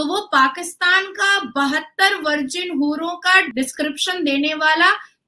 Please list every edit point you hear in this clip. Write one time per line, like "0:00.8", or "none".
0:03.5